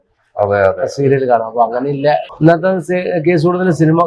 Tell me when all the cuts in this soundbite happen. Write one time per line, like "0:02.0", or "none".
0:02.3

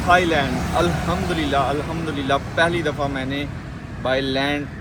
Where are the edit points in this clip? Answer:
none

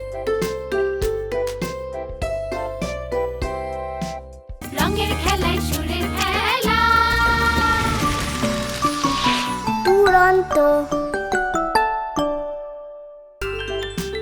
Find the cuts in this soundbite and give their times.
0:12.9

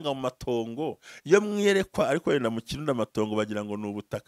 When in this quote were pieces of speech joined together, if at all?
none

